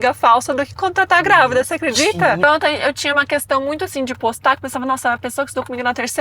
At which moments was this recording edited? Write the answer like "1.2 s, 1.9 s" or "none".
2.4 s